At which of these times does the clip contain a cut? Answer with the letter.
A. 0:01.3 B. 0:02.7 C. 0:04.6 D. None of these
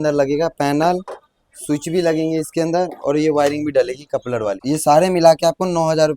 C